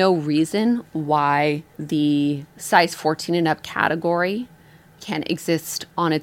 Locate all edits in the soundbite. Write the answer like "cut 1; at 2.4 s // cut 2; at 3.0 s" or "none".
cut 1; at 1.7 s // cut 2; at 2.5 s // cut 3; at 5.0 s